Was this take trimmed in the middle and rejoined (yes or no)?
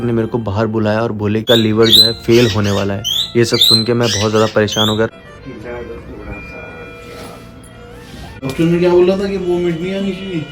yes